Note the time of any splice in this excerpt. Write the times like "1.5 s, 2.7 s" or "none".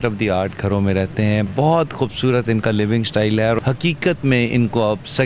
1.5 s, 3.6 s